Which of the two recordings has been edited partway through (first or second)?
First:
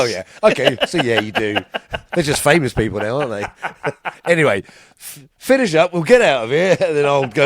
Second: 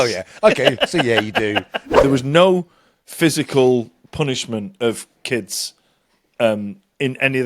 second